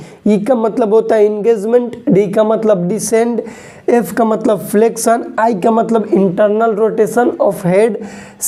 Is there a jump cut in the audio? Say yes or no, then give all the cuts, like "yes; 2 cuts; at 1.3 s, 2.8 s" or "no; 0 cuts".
no; 0 cuts